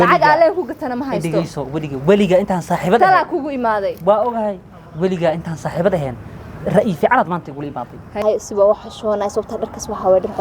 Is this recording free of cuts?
no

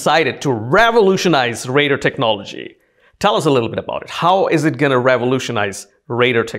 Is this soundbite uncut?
yes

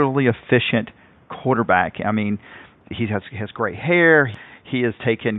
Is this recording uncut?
no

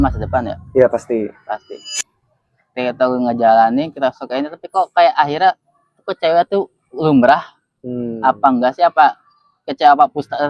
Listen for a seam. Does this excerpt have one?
no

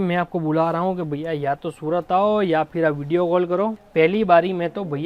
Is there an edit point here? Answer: yes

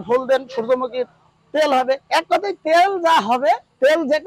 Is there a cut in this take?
no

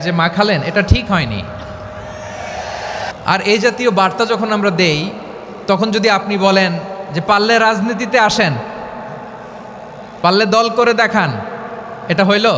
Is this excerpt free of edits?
no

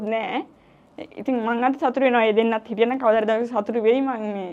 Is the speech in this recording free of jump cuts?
yes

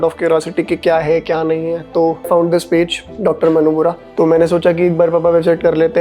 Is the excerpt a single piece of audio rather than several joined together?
no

